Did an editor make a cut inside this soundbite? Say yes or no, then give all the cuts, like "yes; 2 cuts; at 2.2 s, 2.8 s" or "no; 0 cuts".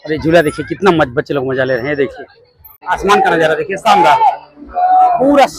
yes; 1 cut; at 2.8 s